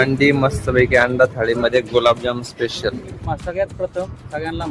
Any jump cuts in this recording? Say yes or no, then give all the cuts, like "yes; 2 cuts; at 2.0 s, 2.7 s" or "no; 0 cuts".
yes; 1 cut; at 3.1 s